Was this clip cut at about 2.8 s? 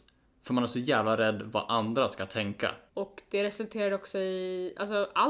yes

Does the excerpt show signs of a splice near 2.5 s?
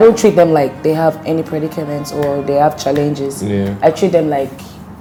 no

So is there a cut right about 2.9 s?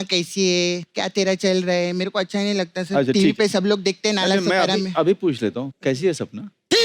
no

